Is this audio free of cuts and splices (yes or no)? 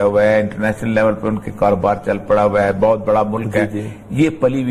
yes